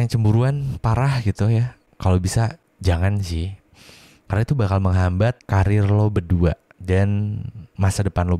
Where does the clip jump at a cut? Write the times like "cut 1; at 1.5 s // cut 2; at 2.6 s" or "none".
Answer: cut 1; at 1.8 s // cut 2; at 2.7 s // cut 3; at 5.4 s // cut 4; at 6.7 s